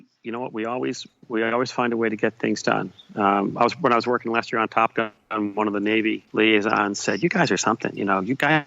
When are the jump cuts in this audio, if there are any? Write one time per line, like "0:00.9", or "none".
0:06.2